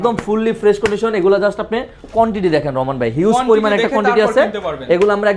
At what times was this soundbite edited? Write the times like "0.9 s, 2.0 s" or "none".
none